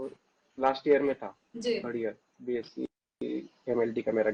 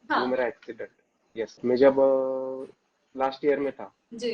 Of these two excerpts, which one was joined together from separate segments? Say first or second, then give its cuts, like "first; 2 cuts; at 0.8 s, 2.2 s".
second; 1 cut; at 1.6 s